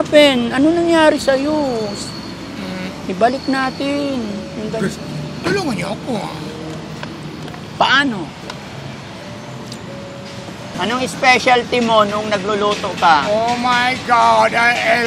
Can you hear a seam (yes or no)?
yes